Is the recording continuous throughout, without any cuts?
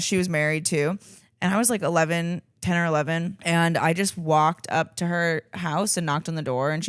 no; 1 cut; at 3.3 s

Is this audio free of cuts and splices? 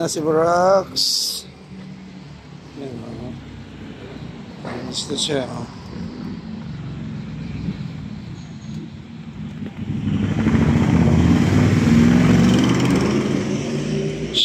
yes; 0 cuts

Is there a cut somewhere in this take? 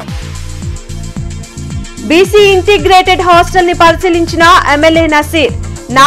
yes; 1 cut; at 1.7 s

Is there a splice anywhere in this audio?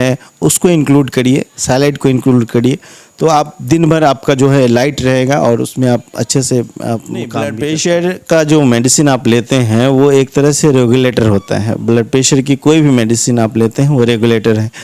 yes; 1 cut; at 7.5 s

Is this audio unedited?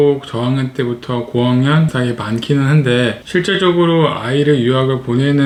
yes; 0 cuts

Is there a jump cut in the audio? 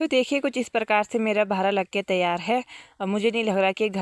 no; 0 cuts

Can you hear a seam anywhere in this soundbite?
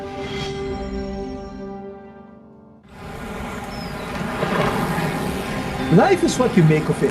yes; 1 cut; at 2.8 s

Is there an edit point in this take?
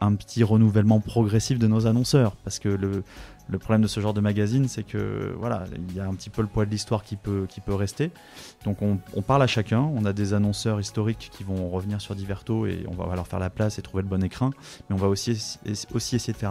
no; 0 cuts

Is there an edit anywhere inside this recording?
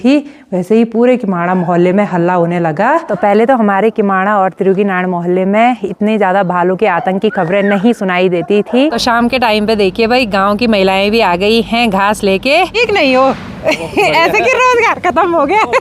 yes; 3 cuts; at 3.1 s, 9.0 s, 12.7 s

